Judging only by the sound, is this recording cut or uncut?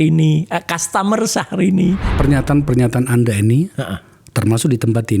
cut